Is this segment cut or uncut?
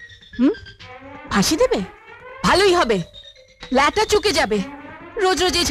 uncut